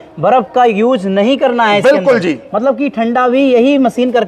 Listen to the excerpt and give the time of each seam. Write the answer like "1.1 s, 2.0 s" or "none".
none